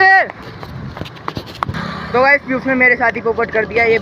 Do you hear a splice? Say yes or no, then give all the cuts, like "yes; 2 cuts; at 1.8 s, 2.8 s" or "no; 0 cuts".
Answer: yes; 1 cut; at 1.8 s